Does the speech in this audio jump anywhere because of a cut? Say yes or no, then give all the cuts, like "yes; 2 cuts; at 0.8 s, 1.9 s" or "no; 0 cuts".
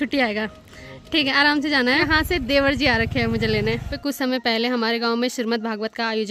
yes; 2 cuts; at 2.1 s, 3.9 s